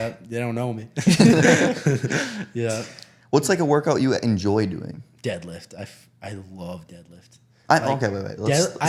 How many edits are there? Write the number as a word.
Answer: zero